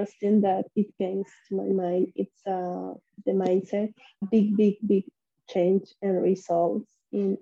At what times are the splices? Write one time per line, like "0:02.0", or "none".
0:04.2